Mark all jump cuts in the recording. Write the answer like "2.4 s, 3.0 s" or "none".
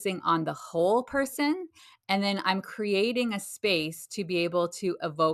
none